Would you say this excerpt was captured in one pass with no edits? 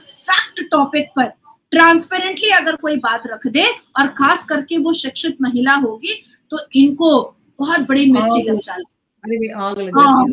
yes; 0 cuts

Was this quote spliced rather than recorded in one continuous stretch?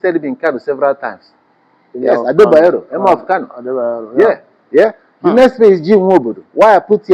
no; 0 cuts

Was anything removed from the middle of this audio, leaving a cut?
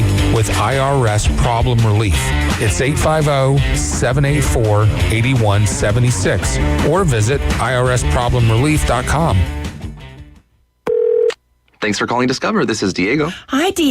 yes; 1 cut; at 10.7 s

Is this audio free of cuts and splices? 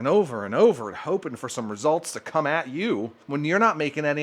no; 1 cut; at 3.2 s

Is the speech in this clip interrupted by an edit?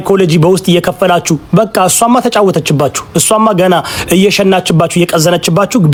no; 0 cuts

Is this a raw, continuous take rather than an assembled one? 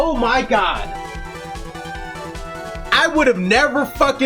no; 1 cut; at 1.2 s

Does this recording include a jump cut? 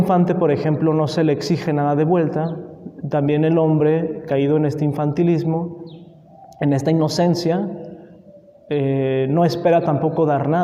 no; 0 cuts

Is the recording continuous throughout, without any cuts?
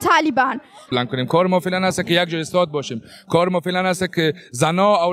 no; 1 cut; at 0.9 s

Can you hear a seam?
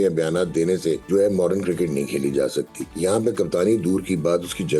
yes; 2 cuts; at 1.0 s, 2.8 s

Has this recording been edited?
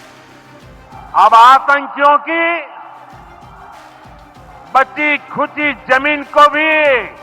yes; 1 cut; at 0.9 s

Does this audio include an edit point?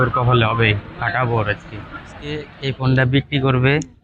yes; 1 cut; at 2.5 s

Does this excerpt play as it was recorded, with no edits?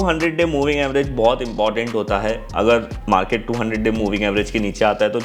yes; 0 cuts

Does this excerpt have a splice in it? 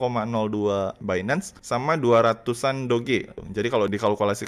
yes; 2 cuts; at 1.1 s, 3.4 s

